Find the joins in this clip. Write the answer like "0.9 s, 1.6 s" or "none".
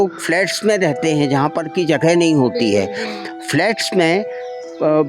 none